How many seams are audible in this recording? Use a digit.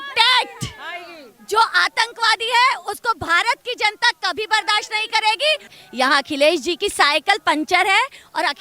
1